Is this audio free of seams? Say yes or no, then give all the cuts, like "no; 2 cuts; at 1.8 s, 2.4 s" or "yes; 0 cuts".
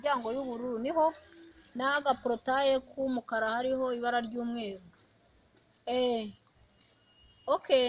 yes; 0 cuts